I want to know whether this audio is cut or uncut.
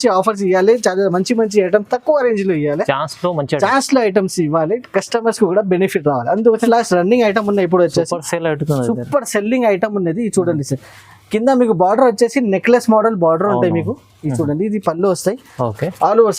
cut